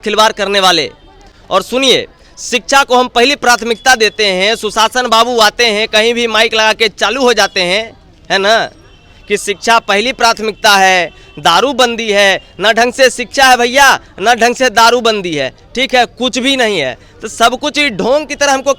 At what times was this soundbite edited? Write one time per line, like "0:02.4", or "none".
none